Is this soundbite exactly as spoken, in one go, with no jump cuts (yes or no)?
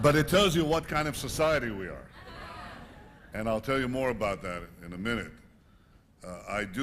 yes